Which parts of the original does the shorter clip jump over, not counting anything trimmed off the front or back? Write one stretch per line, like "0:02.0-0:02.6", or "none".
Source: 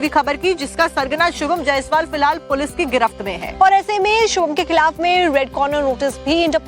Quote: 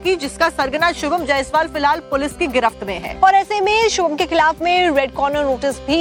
none